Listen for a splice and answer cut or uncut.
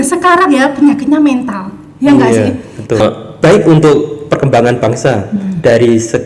cut